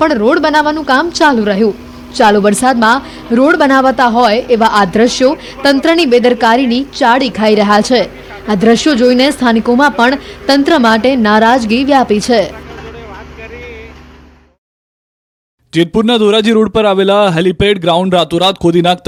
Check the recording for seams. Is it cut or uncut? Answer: uncut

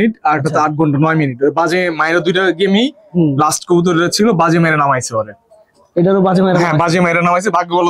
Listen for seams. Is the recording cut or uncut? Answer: uncut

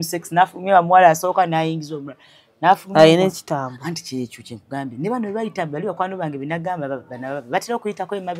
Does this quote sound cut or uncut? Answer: uncut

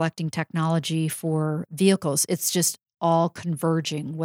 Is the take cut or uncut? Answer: uncut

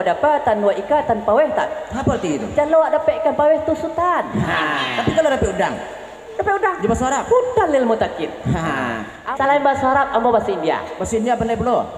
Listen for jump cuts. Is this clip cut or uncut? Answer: cut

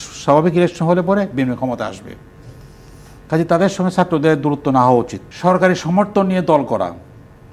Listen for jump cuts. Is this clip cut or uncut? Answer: cut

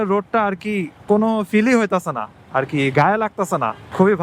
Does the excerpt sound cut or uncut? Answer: uncut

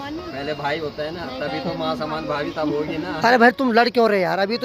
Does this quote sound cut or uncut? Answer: uncut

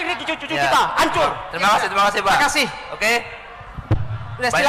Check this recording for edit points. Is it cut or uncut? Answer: uncut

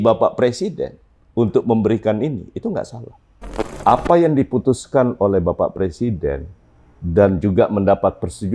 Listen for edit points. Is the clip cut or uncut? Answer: cut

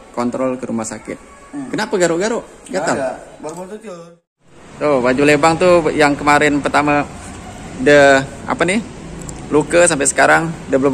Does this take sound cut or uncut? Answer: cut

